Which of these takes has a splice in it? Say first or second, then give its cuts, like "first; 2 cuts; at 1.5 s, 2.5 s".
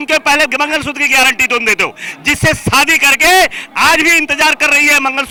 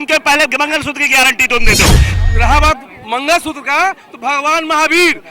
second; 1 cut; at 2.1 s